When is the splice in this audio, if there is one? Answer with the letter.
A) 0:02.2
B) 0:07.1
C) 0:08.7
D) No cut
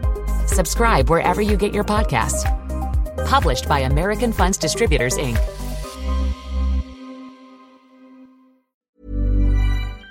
C